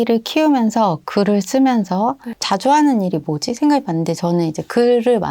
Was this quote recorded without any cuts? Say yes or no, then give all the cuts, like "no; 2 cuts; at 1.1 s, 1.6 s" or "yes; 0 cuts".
no; 1 cut; at 2.3 s